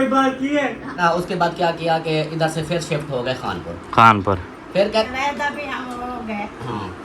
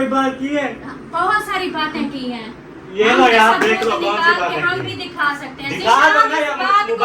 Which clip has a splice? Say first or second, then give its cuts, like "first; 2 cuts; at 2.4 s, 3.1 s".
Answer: first; 2 cuts; at 1.0 s, 5.1 s